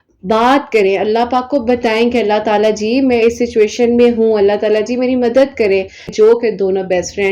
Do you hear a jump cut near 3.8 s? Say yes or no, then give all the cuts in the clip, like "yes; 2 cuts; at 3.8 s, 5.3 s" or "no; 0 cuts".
no; 1 cut; at 6.1 s